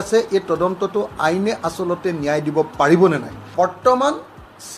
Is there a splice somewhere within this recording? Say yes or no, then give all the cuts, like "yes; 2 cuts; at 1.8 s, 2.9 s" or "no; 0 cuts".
yes; 1 cut; at 3.5 s